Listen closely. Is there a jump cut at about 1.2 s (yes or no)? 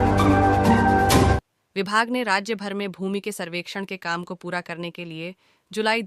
yes